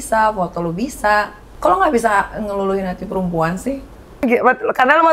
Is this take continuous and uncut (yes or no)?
no